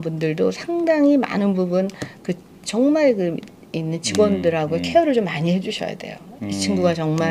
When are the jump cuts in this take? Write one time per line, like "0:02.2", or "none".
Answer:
none

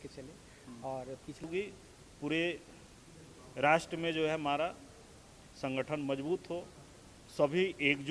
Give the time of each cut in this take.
0:01.4

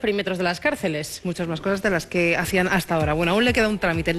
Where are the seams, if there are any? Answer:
0:00.9

